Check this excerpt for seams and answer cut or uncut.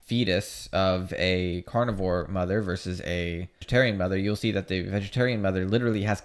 cut